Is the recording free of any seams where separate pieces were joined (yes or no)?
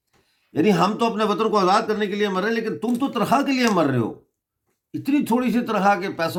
yes